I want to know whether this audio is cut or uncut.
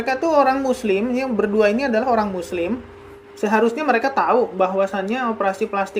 uncut